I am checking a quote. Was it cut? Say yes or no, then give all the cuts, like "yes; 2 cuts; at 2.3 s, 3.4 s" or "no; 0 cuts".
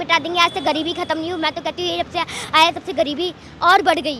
no; 0 cuts